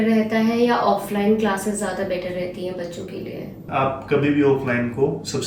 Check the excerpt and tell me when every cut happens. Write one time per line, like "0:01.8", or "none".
0:03.6